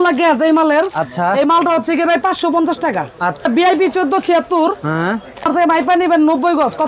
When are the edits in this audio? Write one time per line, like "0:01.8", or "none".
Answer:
0:03.5
0:05.5